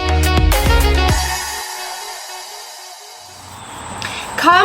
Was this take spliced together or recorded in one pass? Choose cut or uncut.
cut